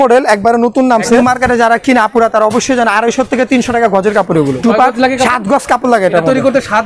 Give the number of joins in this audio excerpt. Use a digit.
2